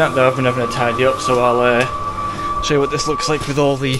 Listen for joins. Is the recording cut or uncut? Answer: uncut